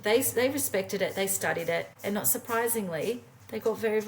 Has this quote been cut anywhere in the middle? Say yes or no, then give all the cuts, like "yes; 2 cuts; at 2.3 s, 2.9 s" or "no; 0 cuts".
yes; 1 cut; at 1.9 s